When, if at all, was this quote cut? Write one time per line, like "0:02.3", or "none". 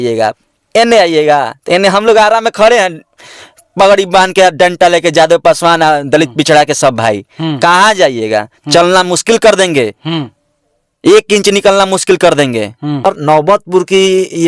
0:13.0